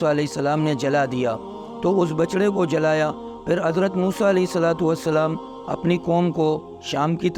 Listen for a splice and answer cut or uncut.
uncut